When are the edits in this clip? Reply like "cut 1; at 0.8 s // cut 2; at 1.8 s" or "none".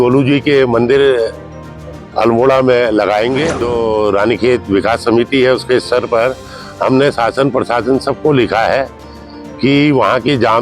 cut 1; at 3.7 s